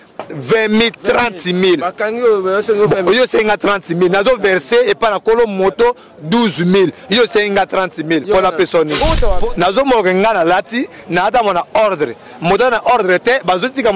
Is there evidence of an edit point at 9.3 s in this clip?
yes; 1 cut; at 9.3 s

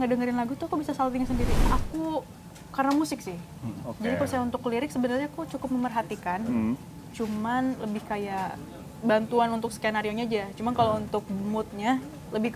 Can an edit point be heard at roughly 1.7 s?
yes; 1 cut; at 1.7 s

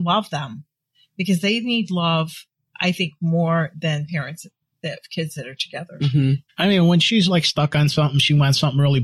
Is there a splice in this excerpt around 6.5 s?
yes; 1 cut; at 6.5 s

